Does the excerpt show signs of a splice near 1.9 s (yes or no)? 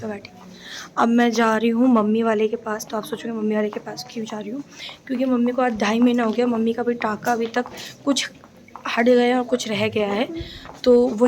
no